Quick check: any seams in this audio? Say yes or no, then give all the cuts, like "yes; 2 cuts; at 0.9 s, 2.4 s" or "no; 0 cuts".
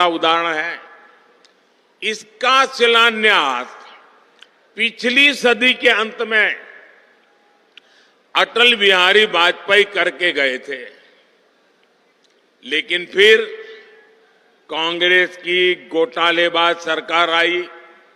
no; 0 cuts